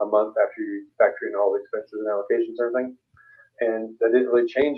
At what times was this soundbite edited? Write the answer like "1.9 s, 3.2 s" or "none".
none